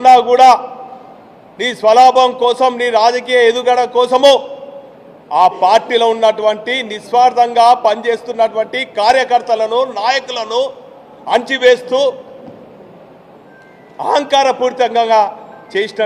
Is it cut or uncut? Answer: uncut